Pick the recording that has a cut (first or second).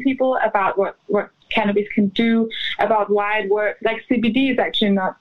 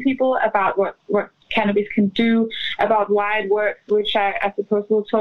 first